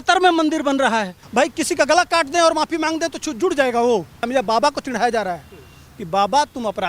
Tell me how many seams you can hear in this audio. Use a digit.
2